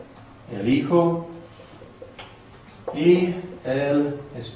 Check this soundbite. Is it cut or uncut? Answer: cut